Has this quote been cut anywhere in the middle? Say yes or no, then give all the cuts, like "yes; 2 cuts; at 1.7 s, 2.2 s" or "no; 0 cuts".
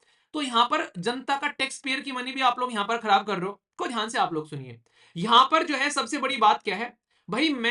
yes; 1 cut; at 3.6 s